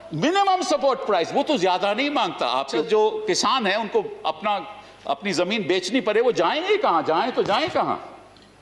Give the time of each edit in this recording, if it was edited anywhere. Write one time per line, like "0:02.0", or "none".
0:02.6

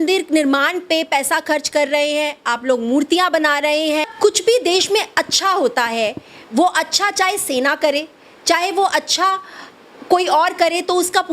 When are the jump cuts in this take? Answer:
0:04.1

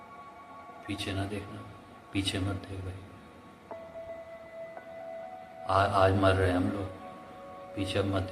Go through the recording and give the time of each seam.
none

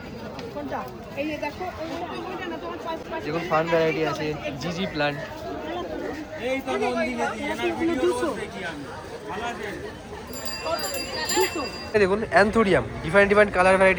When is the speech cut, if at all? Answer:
none

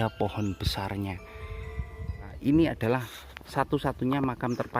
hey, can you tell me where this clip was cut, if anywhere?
0:02.3

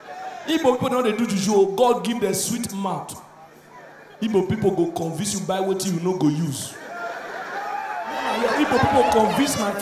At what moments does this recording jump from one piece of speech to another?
0:08.3

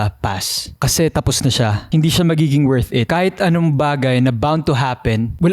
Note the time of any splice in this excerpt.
0:01.8
0:03.0

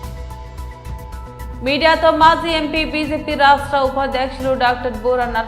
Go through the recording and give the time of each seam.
0:01.5

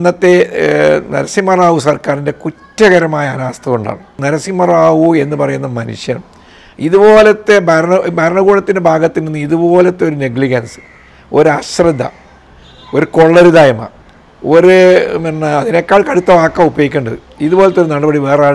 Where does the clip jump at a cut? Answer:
0:04.2

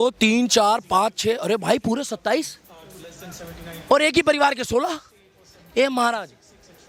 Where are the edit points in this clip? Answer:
none

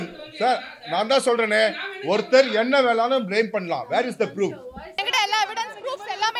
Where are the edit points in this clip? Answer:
0:05.0

